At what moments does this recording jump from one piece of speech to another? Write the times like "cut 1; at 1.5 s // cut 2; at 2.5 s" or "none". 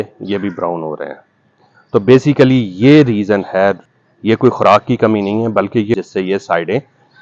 cut 1; at 3.8 s // cut 2; at 5.9 s